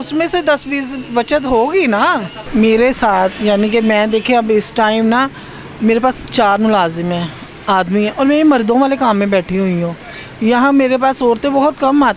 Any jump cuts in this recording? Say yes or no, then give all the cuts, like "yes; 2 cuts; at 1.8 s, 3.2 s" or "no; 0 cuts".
yes; 1 cut; at 2.4 s